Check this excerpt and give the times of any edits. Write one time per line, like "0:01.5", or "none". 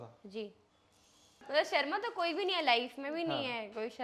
0:01.4